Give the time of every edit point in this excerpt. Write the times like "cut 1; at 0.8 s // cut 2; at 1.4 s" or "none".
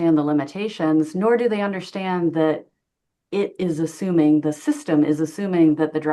none